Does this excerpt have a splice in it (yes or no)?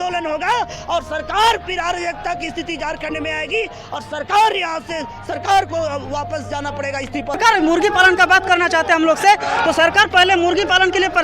yes